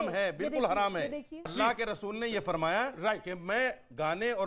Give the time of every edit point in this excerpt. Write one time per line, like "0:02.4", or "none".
0:01.5